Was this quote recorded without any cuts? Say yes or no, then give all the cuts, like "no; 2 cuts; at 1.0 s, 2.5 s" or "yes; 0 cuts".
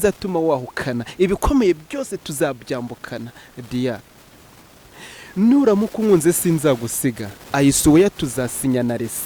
yes; 0 cuts